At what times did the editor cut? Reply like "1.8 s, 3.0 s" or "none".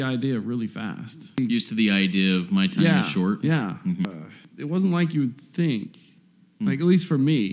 1.4 s, 4.1 s